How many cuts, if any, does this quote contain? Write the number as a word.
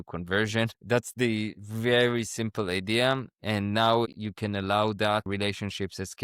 two